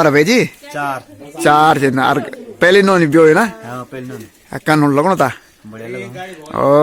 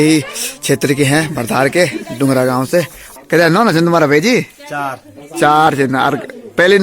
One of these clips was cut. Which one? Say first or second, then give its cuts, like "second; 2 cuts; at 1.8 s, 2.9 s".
second; 1 cut; at 3.0 s